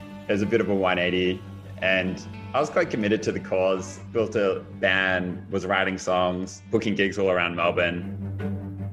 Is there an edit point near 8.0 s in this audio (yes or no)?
yes